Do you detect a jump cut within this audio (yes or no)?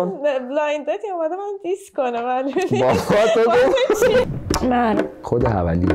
yes